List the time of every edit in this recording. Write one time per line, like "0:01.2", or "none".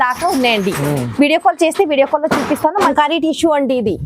0:02.8